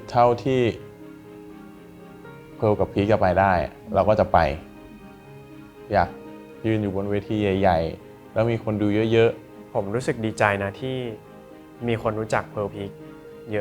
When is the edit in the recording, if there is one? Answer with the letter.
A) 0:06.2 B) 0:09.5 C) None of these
B